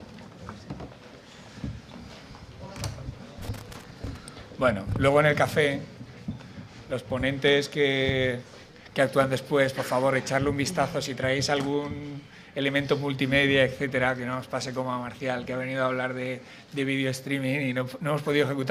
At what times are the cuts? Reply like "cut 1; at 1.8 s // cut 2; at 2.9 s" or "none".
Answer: cut 1; at 15.6 s